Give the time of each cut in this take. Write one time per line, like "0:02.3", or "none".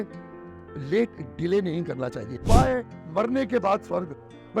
0:02.5